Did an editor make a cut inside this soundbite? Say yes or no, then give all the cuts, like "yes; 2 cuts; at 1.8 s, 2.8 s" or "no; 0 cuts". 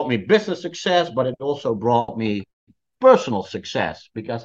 no; 0 cuts